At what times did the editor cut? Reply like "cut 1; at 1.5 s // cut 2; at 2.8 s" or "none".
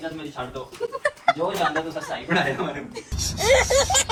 none

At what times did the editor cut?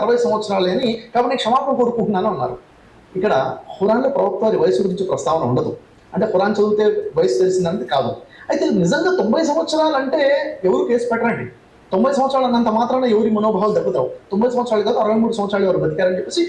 none

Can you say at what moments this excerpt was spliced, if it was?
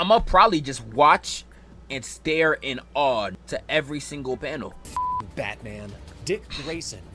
cut 1; at 3.4 s // cut 2; at 4.8 s

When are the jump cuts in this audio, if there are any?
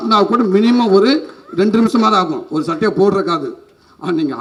none

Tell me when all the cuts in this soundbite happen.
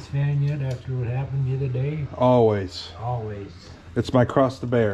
none

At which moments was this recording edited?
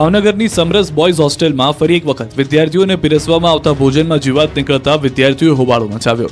cut 1; at 3.2 s

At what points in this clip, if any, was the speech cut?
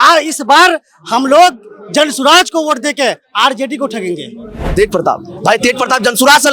cut 1; at 4.7 s

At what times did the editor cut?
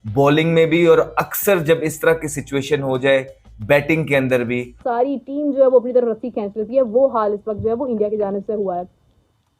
cut 1; at 4.8 s

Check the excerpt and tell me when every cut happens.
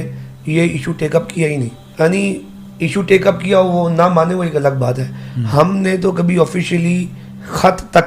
cut 1; at 1.8 s

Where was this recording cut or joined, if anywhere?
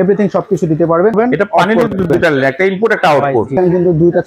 cut 1; at 1.1 s // cut 2; at 3.5 s

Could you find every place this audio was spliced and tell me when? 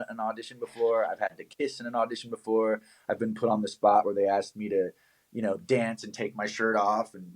none

